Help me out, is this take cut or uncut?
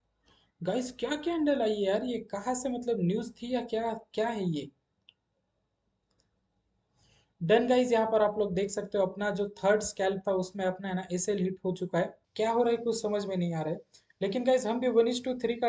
cut